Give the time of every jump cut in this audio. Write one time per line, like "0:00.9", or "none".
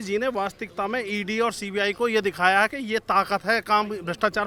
none